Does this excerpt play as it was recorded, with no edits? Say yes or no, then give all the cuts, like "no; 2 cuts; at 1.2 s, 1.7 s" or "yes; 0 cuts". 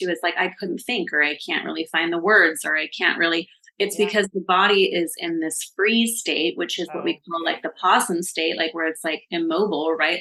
yes; 0 cuts